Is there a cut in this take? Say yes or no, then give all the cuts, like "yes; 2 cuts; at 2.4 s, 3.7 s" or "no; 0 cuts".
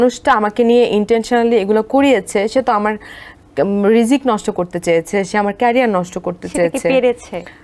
no; 0 cuts